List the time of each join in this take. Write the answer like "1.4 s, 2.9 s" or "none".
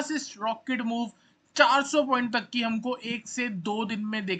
none